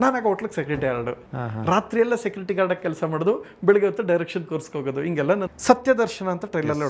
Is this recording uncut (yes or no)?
no